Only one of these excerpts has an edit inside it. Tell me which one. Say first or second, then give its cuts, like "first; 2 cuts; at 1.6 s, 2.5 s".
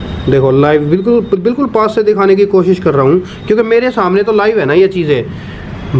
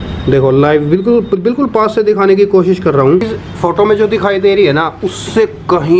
second; 1 cut; at 3.3 s